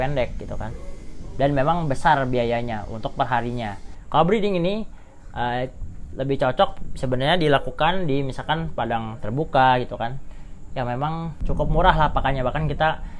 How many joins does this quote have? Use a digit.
1